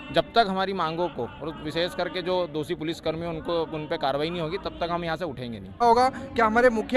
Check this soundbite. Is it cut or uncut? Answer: cut